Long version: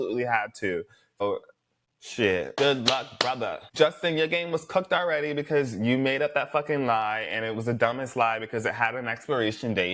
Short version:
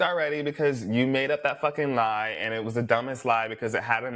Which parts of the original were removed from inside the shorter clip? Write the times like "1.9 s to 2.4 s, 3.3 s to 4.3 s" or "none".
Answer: none